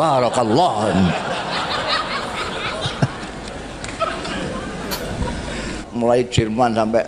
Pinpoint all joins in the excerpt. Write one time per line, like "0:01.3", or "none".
0:05.8